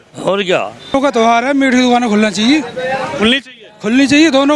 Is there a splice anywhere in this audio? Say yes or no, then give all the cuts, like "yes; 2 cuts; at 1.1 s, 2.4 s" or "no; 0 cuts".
yes; 1 cut; at 0.9 s